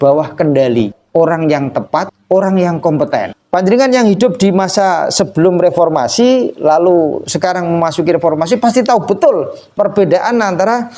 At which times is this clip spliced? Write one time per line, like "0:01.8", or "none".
0:01.0
0:02.1
0:03.4